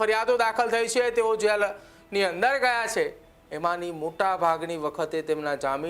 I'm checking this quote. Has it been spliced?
no; 0 cuts

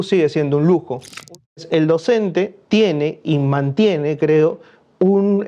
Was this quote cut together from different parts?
yes; 2 cuts; at 1.3 s, 2.6 s

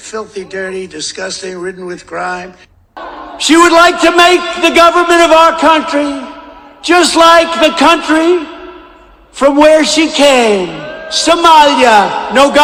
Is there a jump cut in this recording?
no; 0 cuts

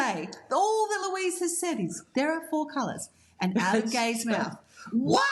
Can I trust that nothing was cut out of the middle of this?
yes; 0 cuts

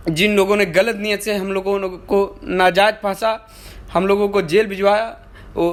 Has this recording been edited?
no; 0 cuts

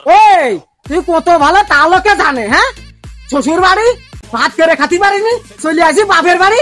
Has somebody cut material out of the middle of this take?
no; 0 cuts

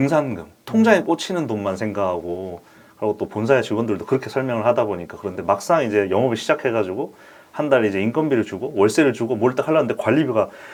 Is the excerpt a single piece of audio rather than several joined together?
yes; 0 cuts

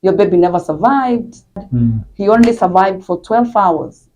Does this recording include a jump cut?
yes; 1 cut; at 1.5 s

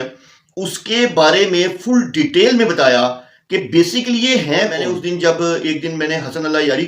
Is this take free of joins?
no; 1 cut; at 4.8 s

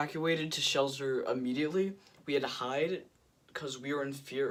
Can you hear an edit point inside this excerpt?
no; 0 cuts

